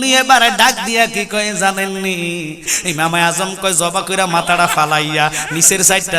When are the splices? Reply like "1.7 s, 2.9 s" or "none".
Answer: 2.7 s